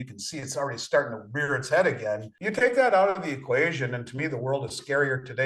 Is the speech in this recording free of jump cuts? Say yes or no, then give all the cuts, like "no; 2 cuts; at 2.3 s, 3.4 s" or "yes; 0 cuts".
no; 1 cut; at 2.3 s